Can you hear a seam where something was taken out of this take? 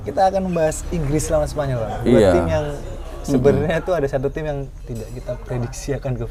no; 0 cuts

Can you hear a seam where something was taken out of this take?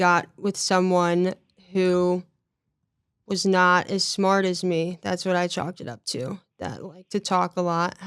no; 0 cuts

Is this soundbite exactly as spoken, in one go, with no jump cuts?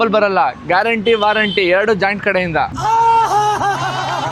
yes; 0 cuts

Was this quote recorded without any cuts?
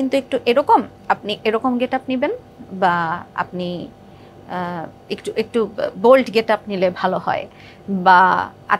yes; 0 cuts

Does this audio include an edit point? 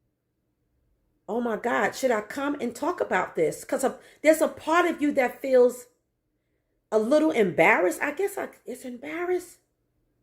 no; 0 cuts

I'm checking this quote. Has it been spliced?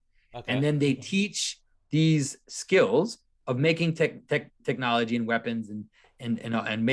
no; 0 cuts

